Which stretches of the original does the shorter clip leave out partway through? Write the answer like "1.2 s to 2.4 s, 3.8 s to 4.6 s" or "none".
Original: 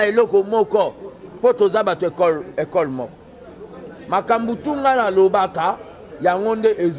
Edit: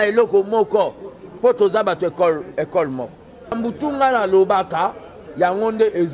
3.5 s to 4.4 s